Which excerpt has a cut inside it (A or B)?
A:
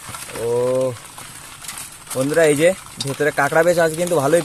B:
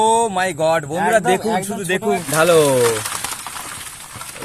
B